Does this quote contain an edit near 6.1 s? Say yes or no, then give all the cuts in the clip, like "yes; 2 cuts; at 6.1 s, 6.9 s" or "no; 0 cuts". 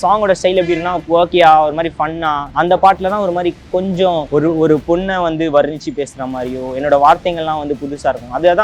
no; 4 cuts; at 0.9 s, 2.5 s, 4.3 s, 4.8 s